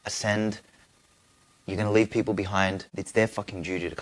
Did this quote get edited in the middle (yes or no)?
no